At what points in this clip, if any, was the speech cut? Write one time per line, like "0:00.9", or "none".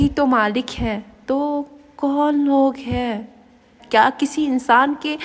0:03.7